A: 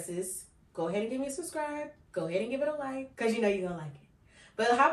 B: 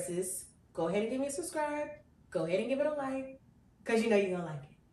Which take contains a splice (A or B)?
A